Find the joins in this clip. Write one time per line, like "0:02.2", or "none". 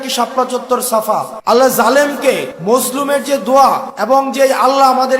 0:01.3
0:02.5
0:03.9